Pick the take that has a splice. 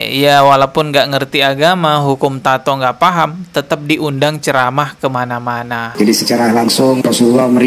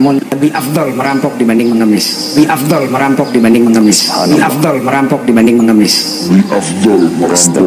first; 1 cut; at 5.8 s

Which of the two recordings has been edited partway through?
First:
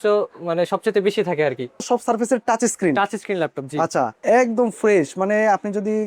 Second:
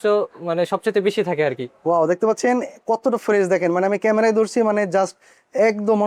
first; 2 cuts; at 1.8 s, 4.2 s

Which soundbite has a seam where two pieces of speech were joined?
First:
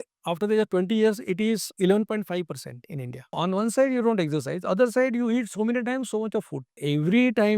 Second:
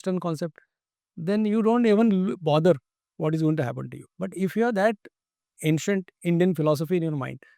first; 3 cuts; at 1.7 s, 3.3 s, 6.8 s

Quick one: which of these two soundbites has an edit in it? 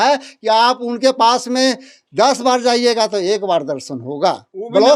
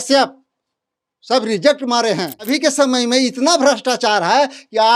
second; 1 cut; at 2.5 s

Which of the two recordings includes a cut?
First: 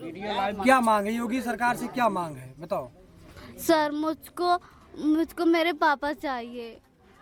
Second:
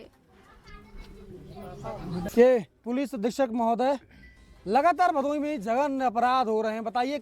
second; 1 cut; at 2.3 s

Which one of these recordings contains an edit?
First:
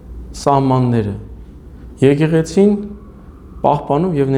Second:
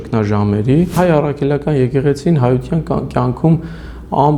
second; 1 cut; at 1.0 s

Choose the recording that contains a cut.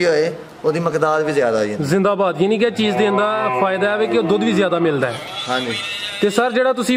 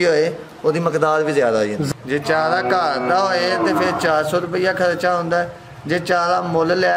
second; 1 cut; at 1.8 s

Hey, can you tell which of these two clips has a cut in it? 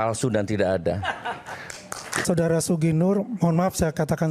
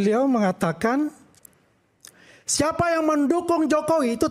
first; 1 cut; at 2.2 s

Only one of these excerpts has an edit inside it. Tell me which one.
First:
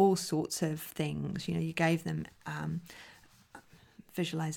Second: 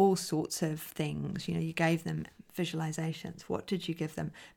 second; 1 cut; at 2.4 s

